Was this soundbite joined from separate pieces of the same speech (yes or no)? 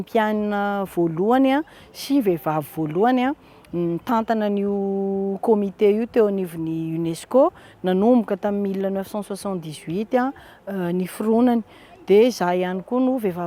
no